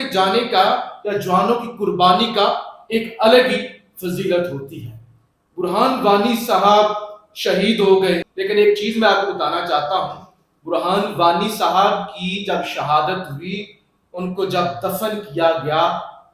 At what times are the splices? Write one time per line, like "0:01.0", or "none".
0:08.3